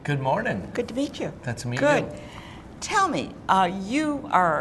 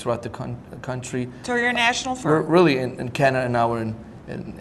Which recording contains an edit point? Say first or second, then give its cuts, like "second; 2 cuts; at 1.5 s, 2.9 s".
second; 1 cut; at 3.4 s